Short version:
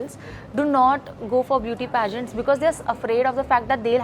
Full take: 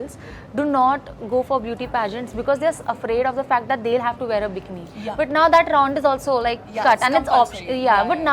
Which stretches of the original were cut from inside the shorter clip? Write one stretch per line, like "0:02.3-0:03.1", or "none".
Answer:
none